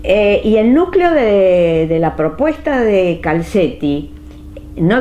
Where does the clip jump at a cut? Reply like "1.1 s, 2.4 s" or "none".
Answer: 1.1 s